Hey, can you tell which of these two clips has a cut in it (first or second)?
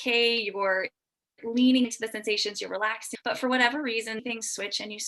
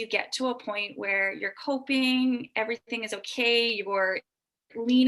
first